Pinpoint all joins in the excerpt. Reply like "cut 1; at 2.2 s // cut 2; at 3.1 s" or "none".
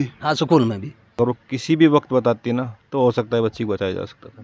cut 1; at 1.0 s